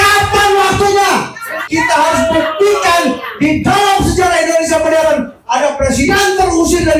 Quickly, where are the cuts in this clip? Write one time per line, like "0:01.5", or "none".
0:01.6